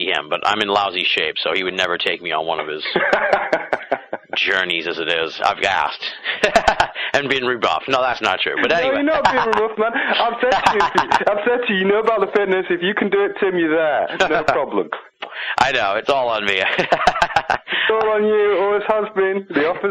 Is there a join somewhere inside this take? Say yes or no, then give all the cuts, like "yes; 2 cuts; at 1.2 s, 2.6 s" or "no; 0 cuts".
no; 0 cuts